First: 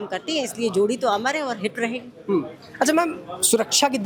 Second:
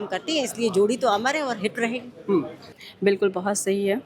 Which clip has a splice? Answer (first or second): second